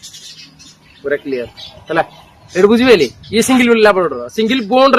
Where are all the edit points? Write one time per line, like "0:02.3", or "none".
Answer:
none

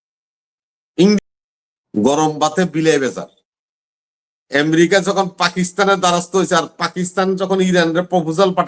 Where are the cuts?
0:01.2

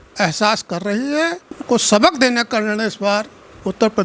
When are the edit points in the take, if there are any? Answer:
0:01.5

